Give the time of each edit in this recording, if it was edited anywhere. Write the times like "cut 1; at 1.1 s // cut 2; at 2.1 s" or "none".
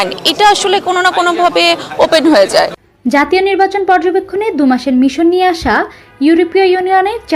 cut 1; at 2.8 s